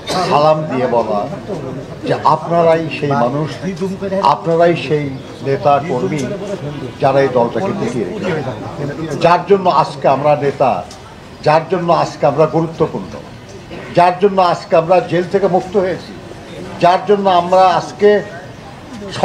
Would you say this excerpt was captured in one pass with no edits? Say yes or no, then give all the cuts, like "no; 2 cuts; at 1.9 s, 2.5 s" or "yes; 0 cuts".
yes; 0 cuts